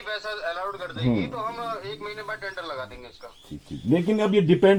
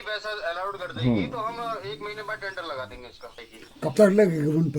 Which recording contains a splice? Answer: second; 1 cut; at 3.4 s

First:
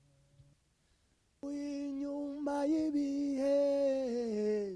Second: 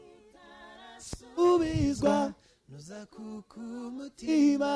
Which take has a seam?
first; 1 cut; at 1.4 s

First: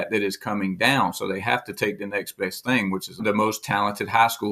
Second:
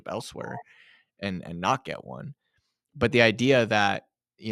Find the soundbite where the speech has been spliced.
first; 1 cut; at 3.2 s

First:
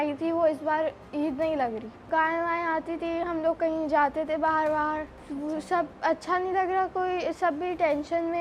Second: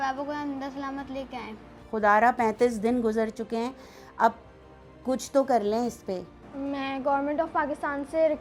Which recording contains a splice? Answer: second; 2 cuts; at 1.7 s, 6.4 s

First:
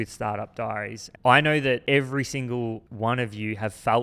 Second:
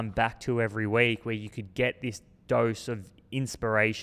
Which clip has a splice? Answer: first; 3 cuts; at 1.0 s, 1.8 s, 2.9 s

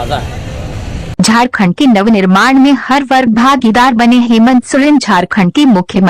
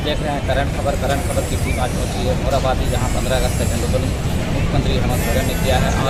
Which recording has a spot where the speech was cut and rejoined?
first; 1 cut; at 1.1 s

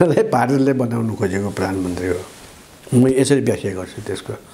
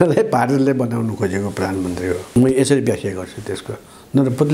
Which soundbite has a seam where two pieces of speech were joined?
second; 1 cut; at 2.3 s

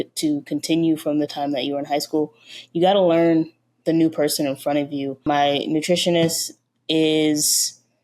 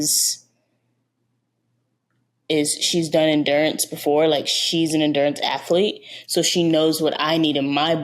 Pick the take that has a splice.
first; 1 cut; at 5.3 s

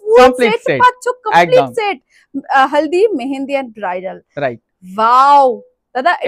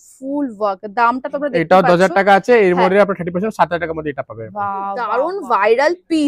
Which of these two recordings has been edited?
second; 1 cut; at 5.1 s

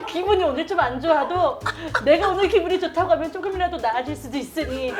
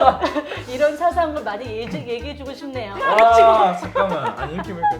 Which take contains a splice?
second; 1 cut; at 3.0 s

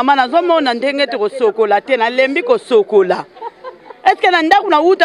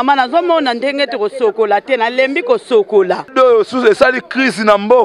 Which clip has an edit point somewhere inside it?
second; 1 cut; at 3.3 s

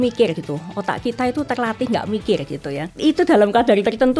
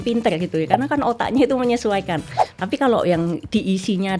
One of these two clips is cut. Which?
first; 1 cut; at 2.9 s

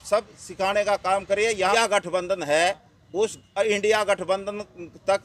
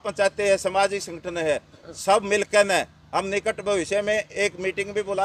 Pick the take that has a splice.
first; 1 cut; at 1.7 s

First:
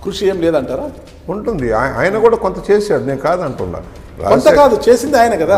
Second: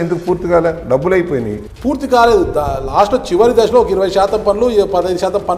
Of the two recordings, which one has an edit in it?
second; 1 cut; at 1.6 s

